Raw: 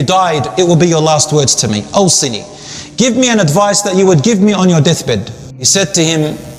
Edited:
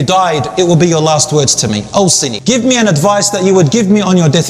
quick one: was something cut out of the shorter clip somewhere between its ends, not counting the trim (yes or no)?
yes